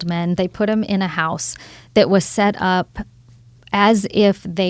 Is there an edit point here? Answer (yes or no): no